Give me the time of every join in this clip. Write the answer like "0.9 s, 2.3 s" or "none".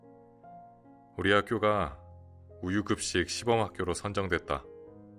1.1 s